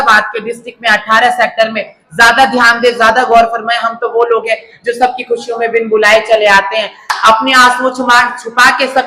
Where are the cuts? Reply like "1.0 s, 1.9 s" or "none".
none